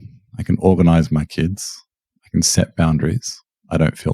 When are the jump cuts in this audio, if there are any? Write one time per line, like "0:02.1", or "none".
none